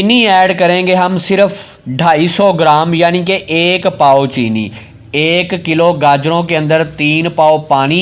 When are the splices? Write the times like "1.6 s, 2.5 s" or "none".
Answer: none